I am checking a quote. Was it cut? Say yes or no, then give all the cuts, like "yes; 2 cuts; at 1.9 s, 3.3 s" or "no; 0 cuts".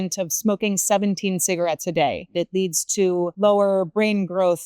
yes; 1 cut; at 2.2 s